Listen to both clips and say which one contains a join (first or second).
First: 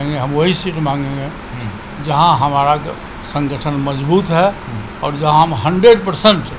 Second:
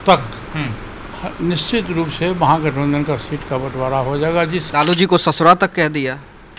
second